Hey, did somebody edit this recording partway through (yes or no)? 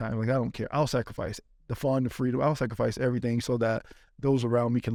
no